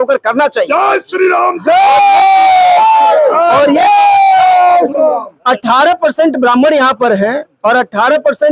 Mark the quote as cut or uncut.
uncut